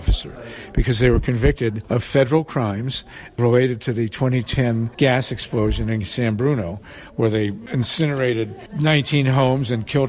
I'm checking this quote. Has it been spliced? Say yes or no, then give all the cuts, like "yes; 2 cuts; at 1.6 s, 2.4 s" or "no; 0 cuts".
yes; 5 cuts; at 1.8 s, 3.4 s, 4.9 s, 7.6 s, 8.6 s